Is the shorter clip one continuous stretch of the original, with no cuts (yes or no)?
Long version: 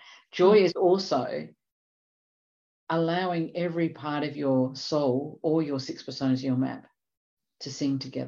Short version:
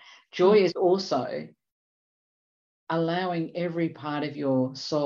yes